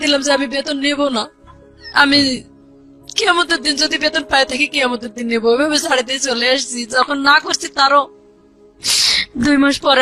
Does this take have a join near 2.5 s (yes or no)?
no